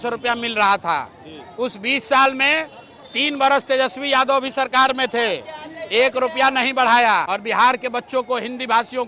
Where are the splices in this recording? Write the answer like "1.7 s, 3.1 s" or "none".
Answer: 7.3 s